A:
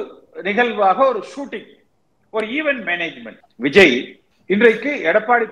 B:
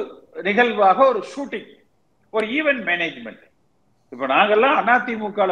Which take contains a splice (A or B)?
A